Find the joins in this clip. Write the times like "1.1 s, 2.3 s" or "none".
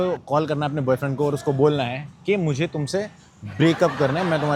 none